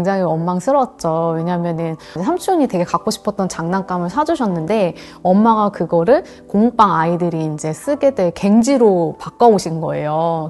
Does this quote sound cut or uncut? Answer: uncut